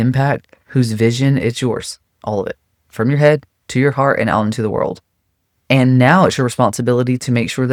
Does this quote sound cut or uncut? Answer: uncut